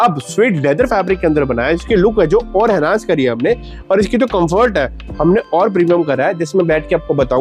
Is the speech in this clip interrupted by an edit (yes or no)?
no